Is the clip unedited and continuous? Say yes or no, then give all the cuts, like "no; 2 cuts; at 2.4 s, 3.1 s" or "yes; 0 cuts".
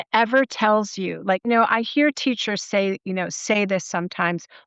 no; 1 cut; at 1.5 s